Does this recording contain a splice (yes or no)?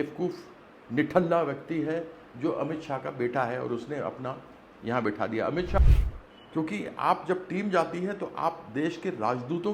yes